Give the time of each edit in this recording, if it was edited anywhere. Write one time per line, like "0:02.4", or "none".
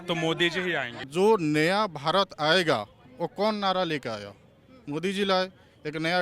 0:01.0